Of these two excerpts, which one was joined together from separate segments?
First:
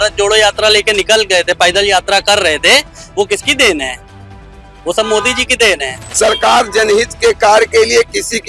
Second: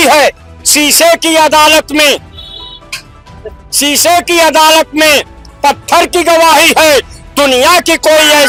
first; 1 cut; at 6.0 s

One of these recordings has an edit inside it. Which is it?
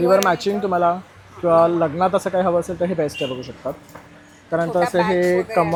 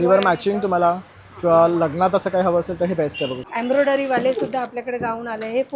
second; 1 cut; at 3.4 s

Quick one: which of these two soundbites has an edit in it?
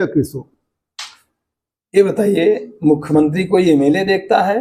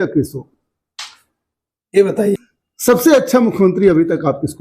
second; 1 cut; at 2.4 s

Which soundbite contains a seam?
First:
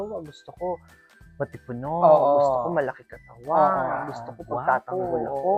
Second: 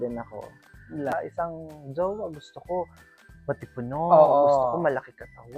second; 1 cut; at 1.1 s

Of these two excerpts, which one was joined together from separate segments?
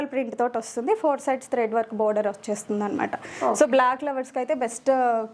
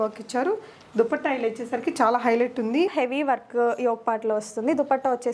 second; 1 cut; at 2.9 s

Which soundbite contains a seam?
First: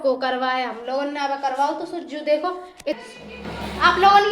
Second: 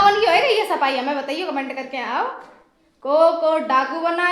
first; 1 cut; at 3.0 s

